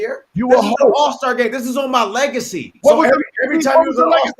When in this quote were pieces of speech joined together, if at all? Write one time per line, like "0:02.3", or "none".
none